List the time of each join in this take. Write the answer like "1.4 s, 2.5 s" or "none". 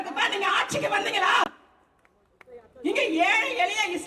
none